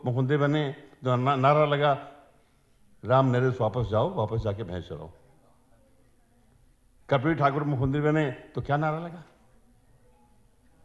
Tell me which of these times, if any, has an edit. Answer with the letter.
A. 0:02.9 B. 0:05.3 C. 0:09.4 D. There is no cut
D